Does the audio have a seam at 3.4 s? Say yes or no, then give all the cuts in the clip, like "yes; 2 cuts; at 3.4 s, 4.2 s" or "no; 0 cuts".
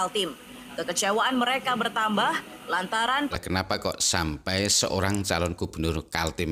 yes; 1 cut; at 3.4 s